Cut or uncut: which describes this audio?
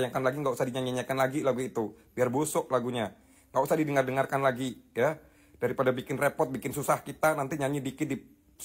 uncut